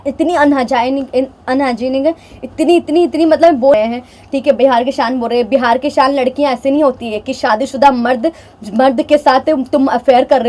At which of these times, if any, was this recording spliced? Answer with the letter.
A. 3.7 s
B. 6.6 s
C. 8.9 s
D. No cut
A